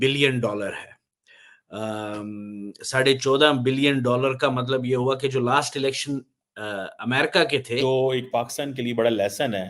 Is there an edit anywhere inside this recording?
yes; 1 cut; at 7.8 s

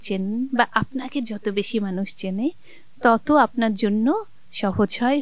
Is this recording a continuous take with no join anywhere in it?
yes; 0 cuts

